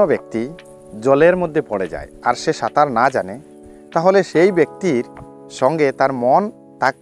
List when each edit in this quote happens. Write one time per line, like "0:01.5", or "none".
none